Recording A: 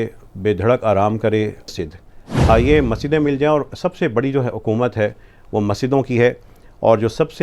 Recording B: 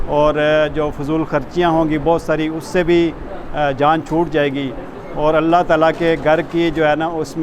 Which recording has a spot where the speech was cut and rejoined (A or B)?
A